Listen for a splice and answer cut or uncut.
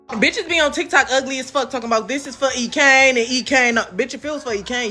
uncut